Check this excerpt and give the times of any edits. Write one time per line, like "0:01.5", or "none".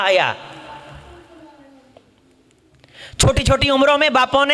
none